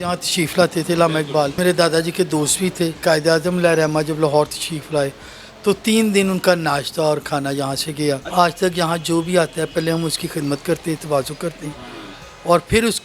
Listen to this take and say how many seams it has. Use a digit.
3